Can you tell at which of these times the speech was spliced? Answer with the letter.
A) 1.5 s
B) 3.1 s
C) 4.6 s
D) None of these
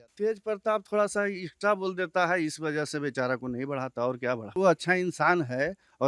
C